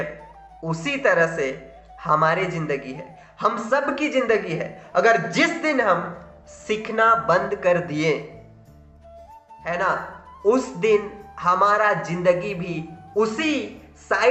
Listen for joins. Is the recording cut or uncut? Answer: uncut